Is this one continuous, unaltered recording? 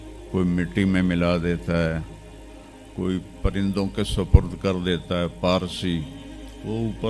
yes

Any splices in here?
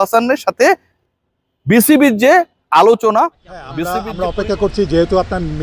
yes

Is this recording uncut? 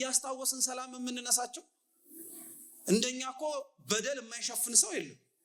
yes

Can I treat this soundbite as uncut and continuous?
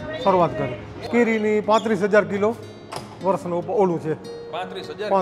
no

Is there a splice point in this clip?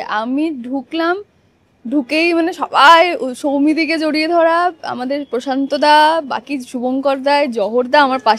no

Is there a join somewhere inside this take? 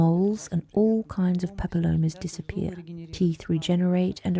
no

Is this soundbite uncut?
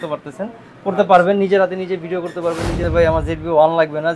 no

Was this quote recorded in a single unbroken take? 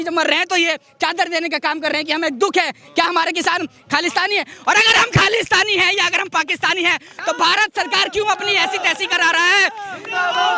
yes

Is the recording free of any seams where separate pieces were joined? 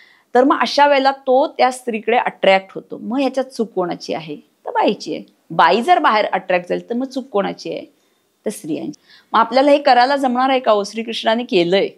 no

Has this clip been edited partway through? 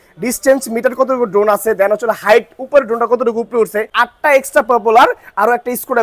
yes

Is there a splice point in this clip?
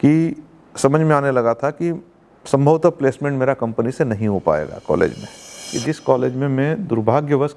yes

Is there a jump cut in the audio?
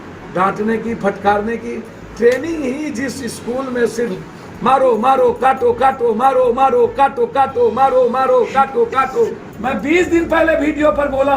yes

